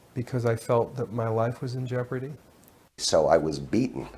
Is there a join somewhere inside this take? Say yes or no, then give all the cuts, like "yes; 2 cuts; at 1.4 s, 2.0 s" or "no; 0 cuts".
yes; 1 cut; at 3.0 s